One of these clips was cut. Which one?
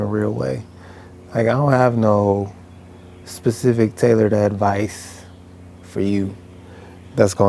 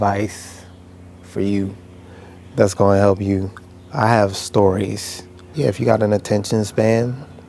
second; 1 cut; at 5.5 s

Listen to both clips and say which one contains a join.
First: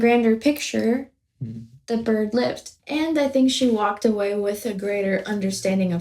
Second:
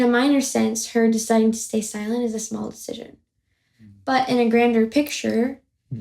first; 1 cut; at 2.7 s

